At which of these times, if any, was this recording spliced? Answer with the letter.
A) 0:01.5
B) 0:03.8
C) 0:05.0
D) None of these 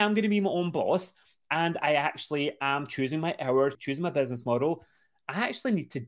B